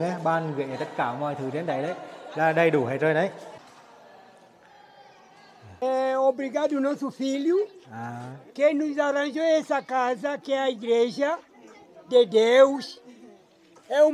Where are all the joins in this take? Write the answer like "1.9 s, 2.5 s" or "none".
3.6 s, 5.8 s